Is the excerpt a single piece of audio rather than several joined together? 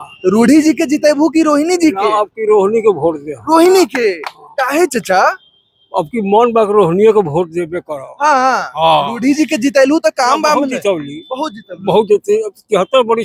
yes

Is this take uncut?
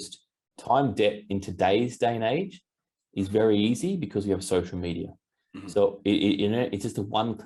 yes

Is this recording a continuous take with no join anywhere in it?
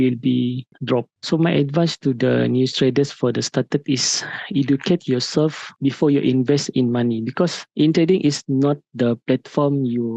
no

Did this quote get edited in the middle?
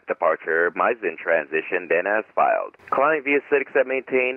yes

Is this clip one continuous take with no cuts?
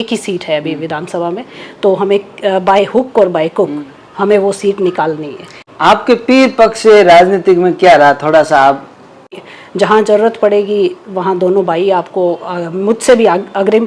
no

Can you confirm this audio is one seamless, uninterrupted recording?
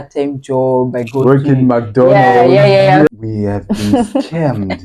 no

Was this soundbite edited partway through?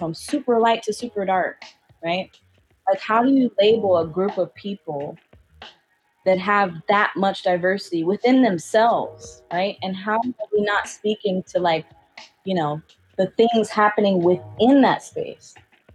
no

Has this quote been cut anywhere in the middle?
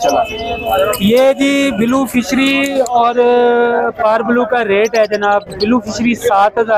no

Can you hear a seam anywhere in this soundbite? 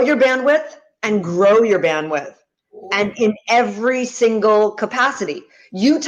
no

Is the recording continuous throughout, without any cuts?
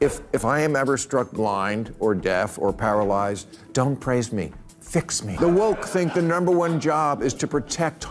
no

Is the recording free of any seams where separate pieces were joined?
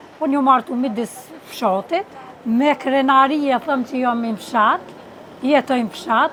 yes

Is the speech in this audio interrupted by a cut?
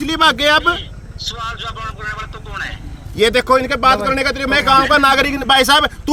no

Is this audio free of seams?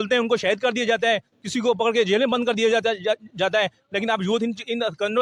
yes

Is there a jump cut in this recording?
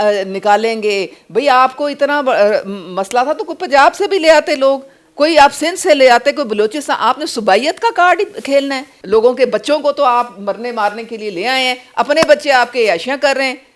yes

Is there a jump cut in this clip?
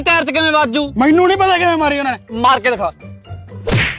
yes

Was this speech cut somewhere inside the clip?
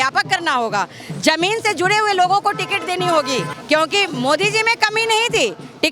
yes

